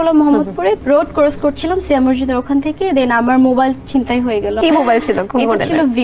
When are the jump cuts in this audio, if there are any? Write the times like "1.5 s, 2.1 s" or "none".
0.8 s, 4.6 s